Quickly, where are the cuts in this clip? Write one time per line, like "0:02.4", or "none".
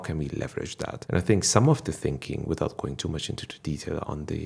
0:01.0